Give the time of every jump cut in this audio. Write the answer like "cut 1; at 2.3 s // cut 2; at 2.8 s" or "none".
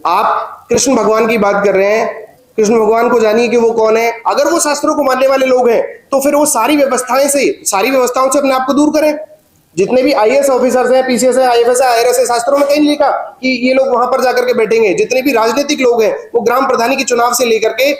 cut 1; at 4.2 s